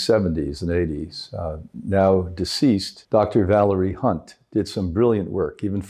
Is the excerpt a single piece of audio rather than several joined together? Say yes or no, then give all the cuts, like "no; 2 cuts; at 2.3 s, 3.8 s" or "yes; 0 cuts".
no; 1 cut; at 2.9 s